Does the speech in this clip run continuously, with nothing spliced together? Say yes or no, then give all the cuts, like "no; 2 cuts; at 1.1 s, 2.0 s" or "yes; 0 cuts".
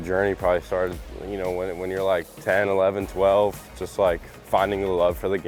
no; 1 cut; at 2.3 s